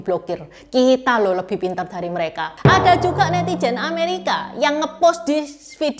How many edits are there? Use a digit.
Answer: 1